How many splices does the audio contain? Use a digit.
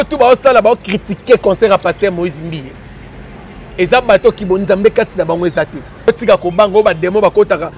1